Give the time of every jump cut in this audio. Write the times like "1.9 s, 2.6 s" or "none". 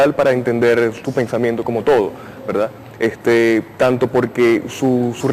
none